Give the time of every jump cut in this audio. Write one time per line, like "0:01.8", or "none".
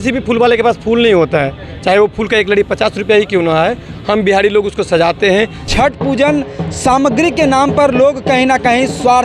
0:05.7